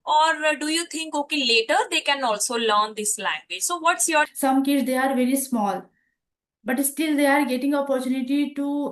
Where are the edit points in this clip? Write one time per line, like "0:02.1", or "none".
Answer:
0:04.3